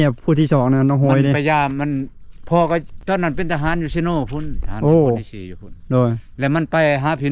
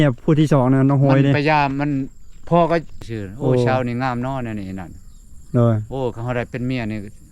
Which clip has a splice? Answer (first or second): second